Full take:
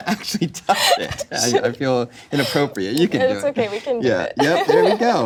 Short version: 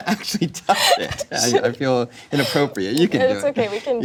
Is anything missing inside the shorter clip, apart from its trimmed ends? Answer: no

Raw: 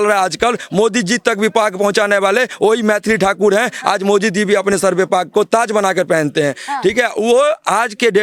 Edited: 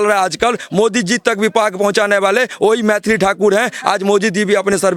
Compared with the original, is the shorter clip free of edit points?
yes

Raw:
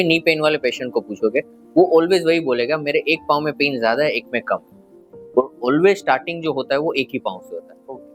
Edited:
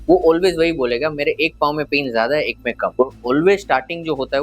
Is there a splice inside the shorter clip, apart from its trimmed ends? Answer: yes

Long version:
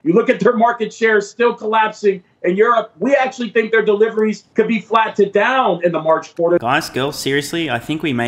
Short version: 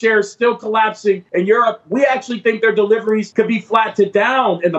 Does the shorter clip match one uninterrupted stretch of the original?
no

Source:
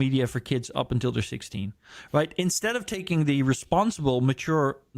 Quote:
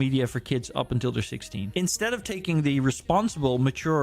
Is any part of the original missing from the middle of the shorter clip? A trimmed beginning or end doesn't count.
yes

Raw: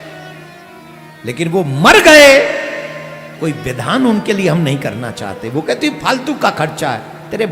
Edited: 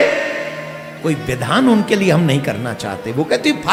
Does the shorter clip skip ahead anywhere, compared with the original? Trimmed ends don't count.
no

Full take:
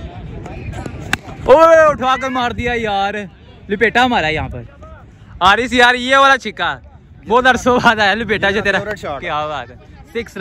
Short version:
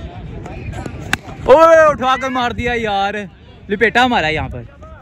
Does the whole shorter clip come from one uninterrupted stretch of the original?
yes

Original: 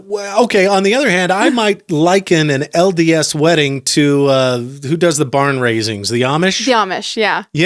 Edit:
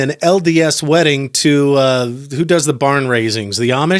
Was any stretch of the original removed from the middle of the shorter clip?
no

